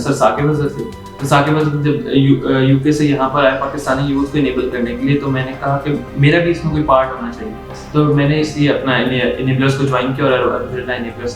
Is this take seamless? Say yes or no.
yes